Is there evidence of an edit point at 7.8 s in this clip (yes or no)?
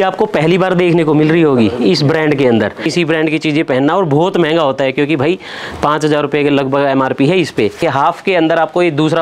yes